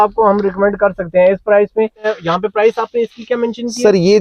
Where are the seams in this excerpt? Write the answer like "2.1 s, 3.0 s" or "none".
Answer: 2.1 s